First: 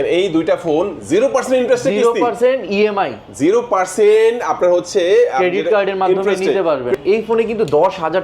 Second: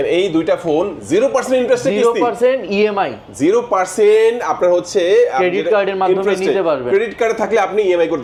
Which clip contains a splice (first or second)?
first